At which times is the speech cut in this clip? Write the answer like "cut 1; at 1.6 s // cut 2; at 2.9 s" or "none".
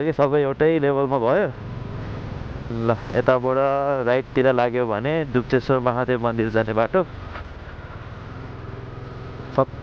cut 1; at 2.6 s